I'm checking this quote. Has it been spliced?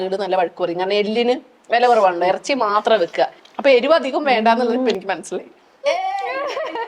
yes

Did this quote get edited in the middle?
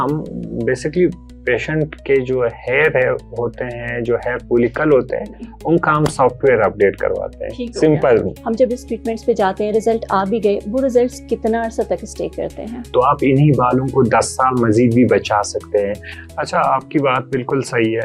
no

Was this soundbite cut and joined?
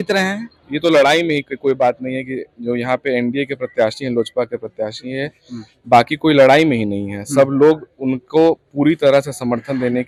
no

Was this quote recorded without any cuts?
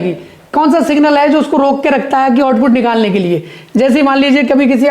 yes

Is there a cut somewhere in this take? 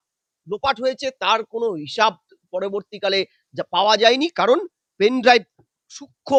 no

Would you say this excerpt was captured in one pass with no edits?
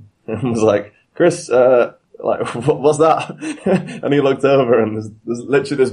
yes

